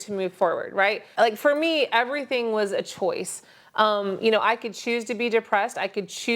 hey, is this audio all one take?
no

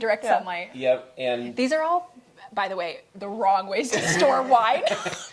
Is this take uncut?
yes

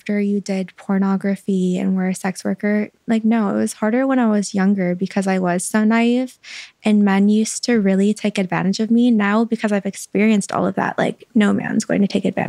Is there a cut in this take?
no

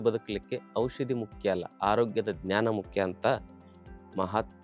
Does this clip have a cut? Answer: no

